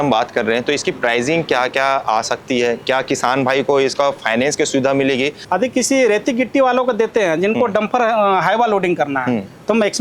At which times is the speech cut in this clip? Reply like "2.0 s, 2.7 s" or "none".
5.4 s